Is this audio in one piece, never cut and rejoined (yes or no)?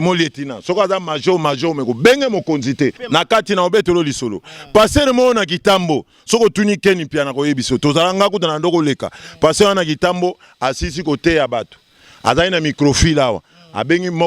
no